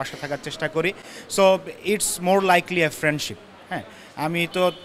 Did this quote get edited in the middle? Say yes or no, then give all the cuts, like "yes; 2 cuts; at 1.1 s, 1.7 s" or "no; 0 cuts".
no; 0 cuts